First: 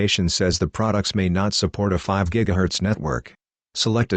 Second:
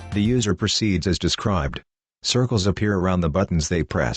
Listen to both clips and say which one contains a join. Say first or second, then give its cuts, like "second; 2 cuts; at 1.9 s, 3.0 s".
second; 1 cut; at 1.8 s